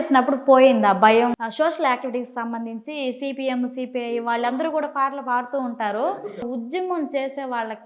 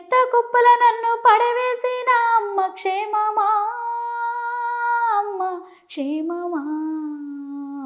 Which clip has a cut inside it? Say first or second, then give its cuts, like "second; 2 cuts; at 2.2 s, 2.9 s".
first; 2 cuts; at 1.3 s, 6.1 s